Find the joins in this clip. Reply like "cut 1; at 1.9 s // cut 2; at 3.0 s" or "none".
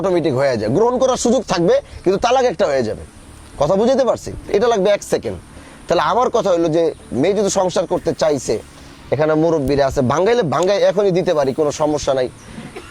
none